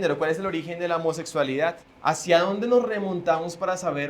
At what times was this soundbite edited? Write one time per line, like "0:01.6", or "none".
0:01.9